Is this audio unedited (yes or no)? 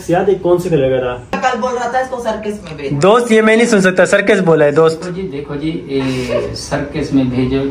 no